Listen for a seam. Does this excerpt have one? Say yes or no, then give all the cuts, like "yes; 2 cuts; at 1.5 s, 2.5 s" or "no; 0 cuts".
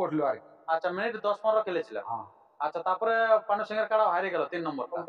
no; 0 cuts